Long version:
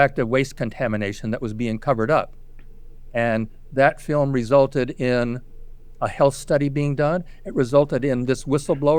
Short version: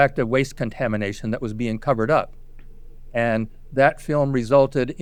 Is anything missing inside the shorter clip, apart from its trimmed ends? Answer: no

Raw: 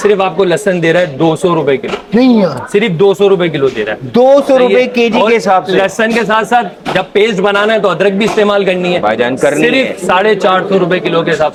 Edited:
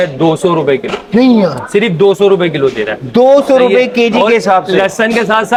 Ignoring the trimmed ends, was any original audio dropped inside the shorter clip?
no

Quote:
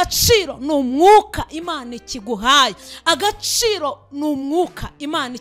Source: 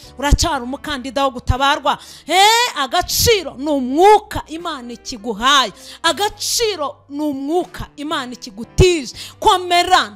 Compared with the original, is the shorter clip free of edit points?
yes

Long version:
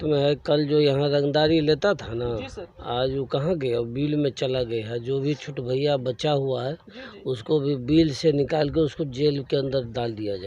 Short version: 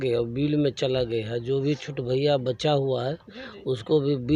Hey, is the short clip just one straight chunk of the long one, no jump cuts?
yes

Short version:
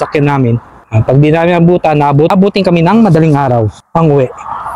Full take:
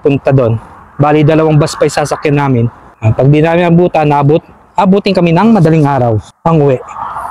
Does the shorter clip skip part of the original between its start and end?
yes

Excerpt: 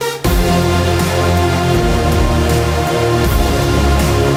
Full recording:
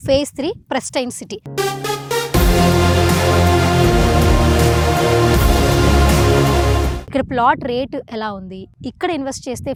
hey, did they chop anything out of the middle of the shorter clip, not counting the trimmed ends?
no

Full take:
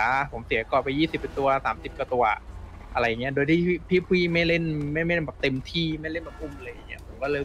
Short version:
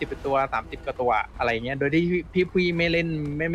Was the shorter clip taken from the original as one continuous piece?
no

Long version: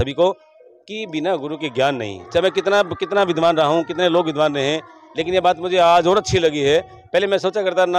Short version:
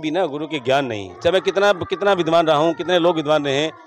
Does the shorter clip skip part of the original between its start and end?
no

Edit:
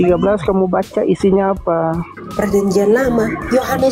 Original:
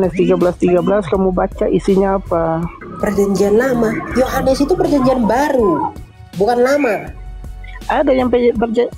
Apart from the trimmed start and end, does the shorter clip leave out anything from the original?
no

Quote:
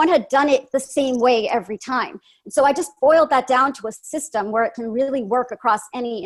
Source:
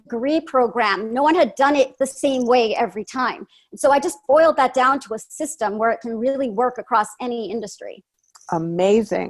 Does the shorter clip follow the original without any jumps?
yes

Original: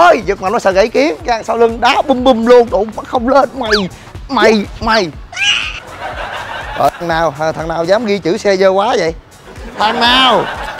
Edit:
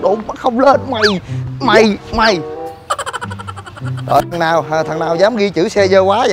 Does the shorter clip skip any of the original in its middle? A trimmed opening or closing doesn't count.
no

